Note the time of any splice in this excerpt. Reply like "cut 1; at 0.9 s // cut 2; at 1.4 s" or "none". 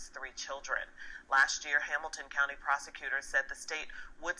cut 1; at 2.2 s

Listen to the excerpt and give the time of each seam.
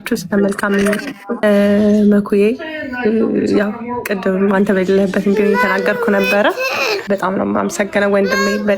cut 1; at 1.4 s // cut 2; at 7.0 s

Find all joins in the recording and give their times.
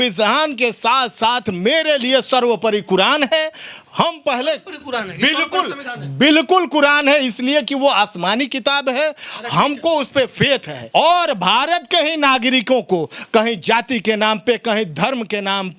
cut 1; at 10.8 s

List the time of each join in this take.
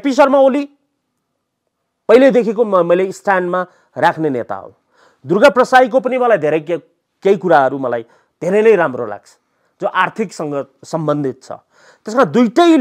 none

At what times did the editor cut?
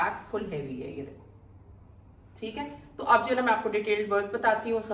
none

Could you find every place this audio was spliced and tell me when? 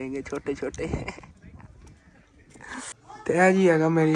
cut 1; at 2.9 s

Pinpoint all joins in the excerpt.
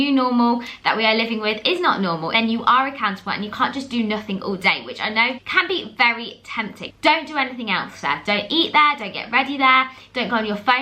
cut 1; at 2.3 s // cut 2; at 5.4 s // cut 3; at 6.8 s

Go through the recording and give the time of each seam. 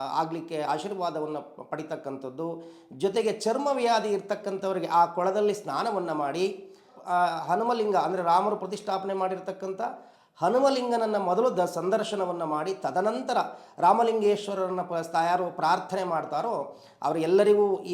none

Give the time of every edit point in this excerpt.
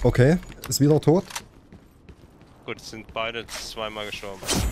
none

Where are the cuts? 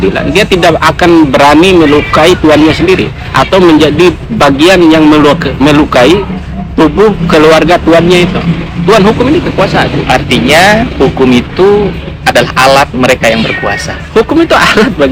none

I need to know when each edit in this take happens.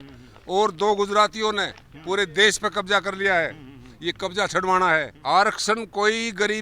cut 1; at 5.1 s

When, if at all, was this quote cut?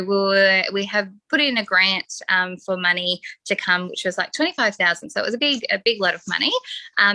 none

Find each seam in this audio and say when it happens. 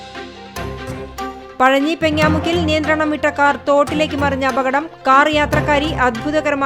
cut 1; at 0.9 s

